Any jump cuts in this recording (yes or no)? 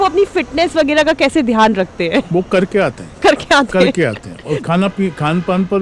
no